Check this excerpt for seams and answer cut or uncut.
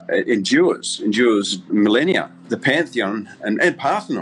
uncut